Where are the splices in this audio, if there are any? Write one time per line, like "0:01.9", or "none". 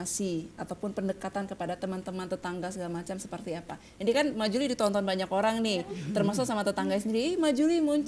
0:03.0